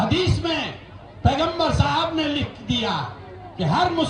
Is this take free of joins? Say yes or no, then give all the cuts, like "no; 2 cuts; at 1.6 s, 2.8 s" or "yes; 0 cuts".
yes; 0 cuts